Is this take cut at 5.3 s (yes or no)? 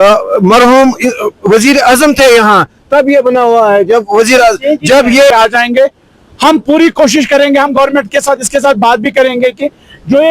yes